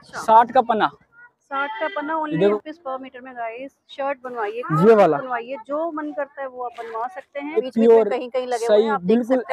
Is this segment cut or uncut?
cut